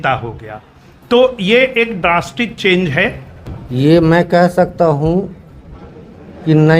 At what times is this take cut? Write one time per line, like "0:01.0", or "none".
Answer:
0:03.2